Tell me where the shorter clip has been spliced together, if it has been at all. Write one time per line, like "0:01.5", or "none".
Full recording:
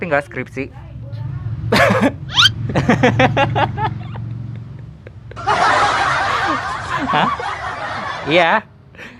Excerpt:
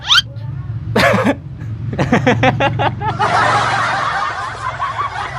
0:03.1